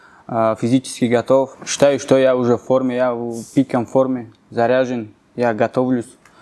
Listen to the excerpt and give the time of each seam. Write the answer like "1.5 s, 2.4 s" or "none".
1.6 s